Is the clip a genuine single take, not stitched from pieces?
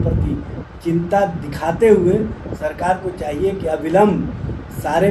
yes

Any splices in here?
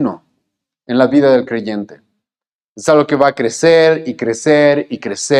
no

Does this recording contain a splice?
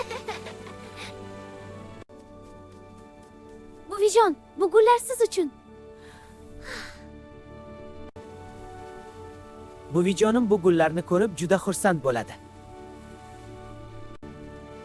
no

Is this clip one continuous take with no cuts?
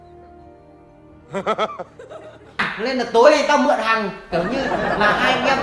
no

